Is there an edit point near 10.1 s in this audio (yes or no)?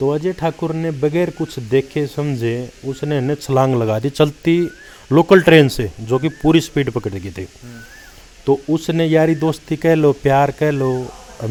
no